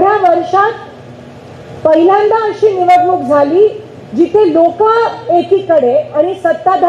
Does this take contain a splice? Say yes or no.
no